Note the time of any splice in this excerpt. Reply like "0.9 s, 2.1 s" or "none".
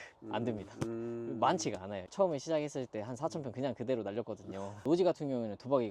2.0 s, 4.7 s